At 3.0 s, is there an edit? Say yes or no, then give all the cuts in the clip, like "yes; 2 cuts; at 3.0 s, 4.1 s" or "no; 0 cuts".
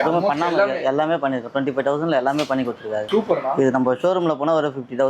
yes; 1 cut; at 3.0 s